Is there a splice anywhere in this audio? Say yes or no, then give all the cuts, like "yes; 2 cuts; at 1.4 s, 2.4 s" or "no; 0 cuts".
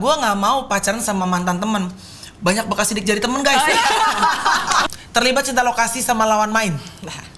yes; 1 cut; at 4.9 s